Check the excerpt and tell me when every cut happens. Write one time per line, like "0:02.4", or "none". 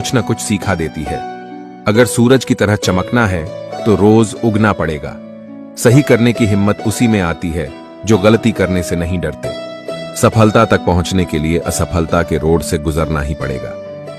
none